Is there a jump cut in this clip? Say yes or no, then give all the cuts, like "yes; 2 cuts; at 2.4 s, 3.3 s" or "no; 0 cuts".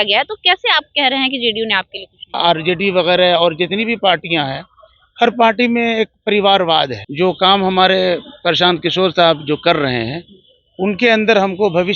yes; 2 cuts; at 2.3 s, 7.0 s